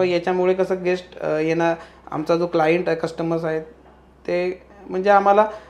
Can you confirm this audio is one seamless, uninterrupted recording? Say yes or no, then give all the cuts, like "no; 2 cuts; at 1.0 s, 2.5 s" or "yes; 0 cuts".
yes; 0 cuts